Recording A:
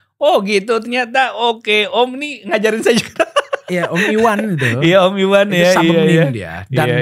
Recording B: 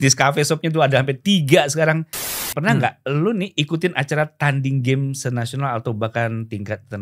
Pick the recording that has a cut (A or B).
B